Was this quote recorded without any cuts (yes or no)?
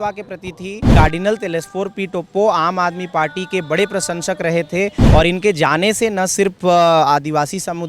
no